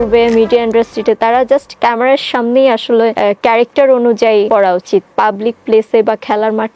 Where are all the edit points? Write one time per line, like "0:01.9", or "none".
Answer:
0:03.1
0:04.5